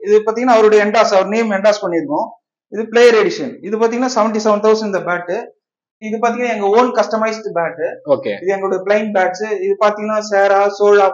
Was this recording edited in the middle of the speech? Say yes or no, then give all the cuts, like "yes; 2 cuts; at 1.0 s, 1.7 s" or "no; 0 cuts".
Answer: yes; 1 cut; at 5.9 s